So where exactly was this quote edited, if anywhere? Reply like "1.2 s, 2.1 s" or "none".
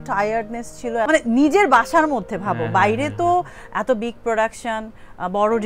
1.1 s